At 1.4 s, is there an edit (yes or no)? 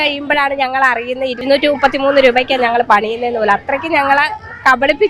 yes